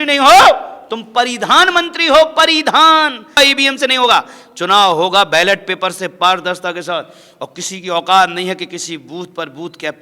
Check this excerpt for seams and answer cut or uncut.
cut